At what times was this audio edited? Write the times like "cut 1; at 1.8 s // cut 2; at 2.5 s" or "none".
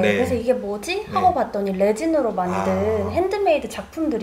none